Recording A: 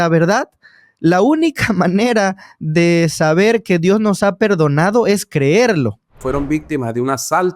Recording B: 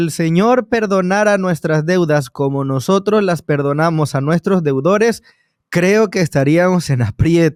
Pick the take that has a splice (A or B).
A